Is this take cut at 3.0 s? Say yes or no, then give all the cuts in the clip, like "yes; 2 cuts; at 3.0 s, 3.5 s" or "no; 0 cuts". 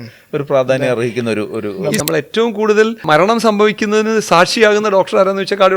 yes; 2 cuts; at 2.0 s, 3.0 s